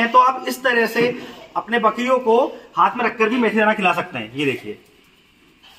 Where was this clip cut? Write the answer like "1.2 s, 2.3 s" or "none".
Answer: none